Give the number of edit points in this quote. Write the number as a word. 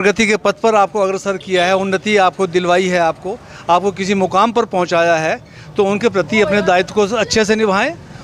zero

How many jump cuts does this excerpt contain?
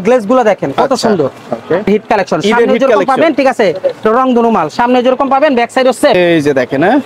two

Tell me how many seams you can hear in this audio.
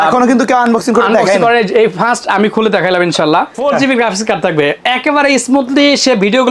one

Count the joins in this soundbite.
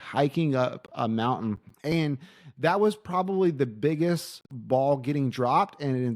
two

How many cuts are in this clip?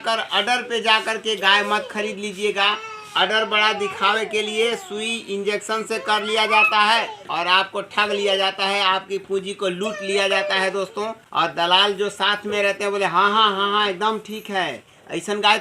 one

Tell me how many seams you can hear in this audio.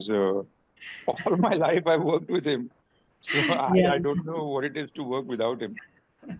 zero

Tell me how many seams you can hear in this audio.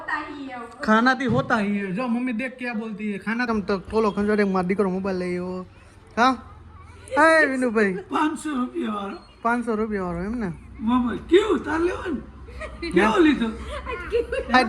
one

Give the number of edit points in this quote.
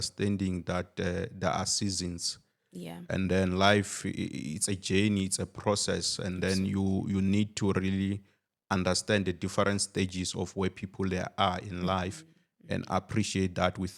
zero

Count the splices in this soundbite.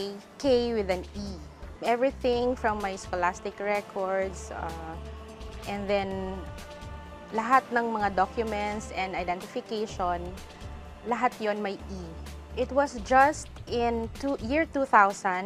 zero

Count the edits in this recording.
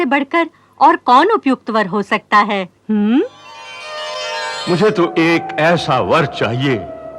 one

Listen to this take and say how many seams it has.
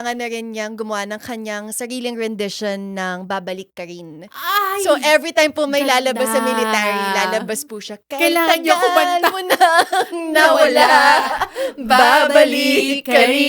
zero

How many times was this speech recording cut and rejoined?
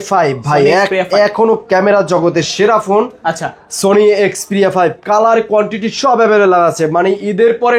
zero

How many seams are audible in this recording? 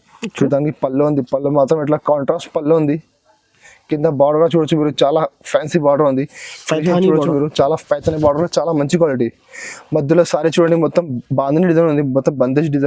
zero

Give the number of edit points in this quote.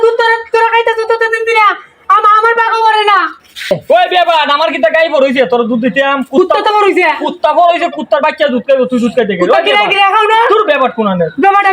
one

